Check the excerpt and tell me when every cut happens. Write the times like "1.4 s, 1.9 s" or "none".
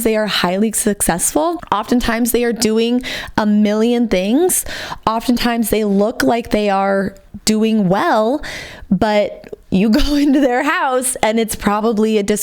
1.6 s